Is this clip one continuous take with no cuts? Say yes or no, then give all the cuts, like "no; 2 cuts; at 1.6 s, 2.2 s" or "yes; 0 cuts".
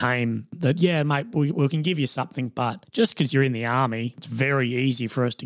no; 3 cuts; at 0.9 s, 2.8 s, 4.3 s